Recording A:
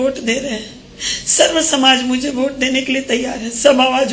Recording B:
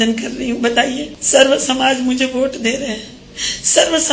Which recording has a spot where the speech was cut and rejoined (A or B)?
B